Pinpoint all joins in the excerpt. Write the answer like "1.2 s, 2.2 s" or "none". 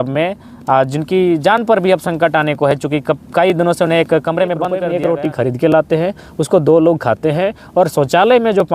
4.8 s